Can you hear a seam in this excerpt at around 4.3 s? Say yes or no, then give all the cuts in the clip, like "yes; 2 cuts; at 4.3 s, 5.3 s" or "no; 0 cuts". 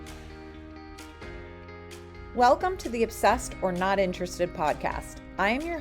no; 1 cut; at 1.6 s